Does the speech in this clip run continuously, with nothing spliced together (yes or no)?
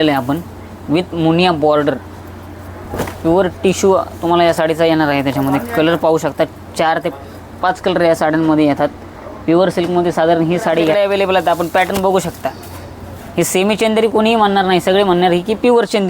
no